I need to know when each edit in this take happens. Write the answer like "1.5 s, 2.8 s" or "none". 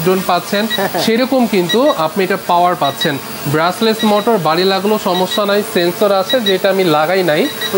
none